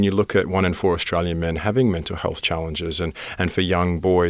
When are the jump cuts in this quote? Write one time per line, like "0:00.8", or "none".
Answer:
none